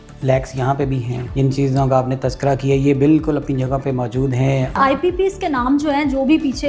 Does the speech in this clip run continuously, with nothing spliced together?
no; 2 cuts; at 1.2 s, 4.8 s

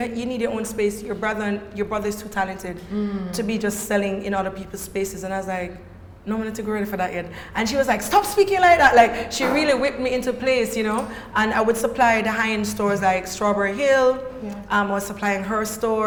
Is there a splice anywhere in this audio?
no; 0 cuts

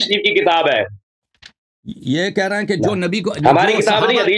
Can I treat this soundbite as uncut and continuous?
yes; 0 cuts

